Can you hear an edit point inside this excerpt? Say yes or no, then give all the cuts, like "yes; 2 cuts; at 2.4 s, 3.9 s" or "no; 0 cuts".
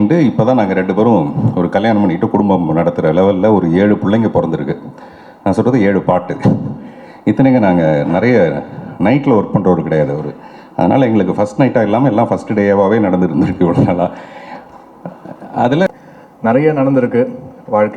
yes; 1 cut; at 15.9 s